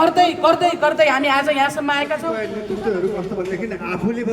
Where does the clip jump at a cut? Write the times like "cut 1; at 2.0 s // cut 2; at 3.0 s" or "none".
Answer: cut 1; at 2.4 s